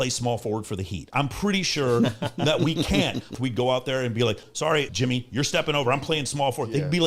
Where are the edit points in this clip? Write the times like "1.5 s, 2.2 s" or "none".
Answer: 3.3 s, 4.8 s